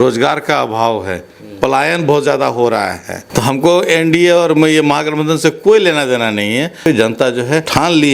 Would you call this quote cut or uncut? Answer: cut